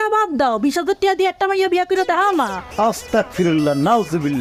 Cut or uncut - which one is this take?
uncut